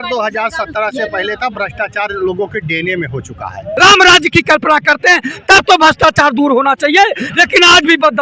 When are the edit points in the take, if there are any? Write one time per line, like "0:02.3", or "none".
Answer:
0:03.7